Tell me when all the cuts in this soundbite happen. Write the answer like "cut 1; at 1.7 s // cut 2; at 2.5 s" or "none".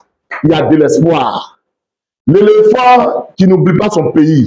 none